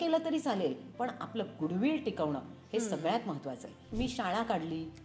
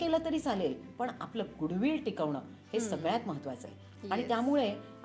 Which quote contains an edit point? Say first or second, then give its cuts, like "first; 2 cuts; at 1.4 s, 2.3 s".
first; 1 cut; at 3.9 s